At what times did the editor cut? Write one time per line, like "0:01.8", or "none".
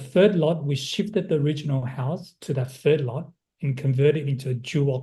none